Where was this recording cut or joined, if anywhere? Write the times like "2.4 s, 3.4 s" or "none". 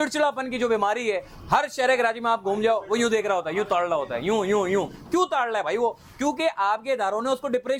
none